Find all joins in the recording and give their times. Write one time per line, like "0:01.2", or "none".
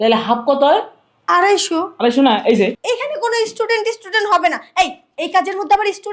0:02.8